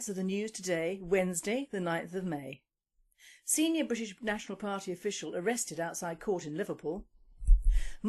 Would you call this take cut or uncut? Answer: uncut